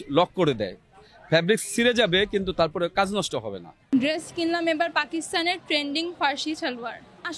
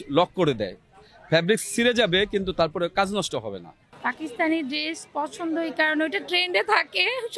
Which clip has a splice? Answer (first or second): second